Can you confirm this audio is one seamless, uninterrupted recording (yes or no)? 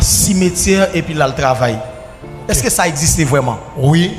yes